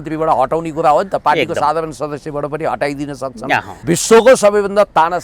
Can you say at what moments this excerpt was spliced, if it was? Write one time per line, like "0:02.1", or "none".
0:03.7